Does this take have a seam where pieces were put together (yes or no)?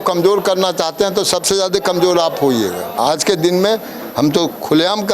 yes